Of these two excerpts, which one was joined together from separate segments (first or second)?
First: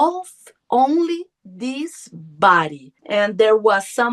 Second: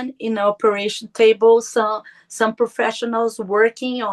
first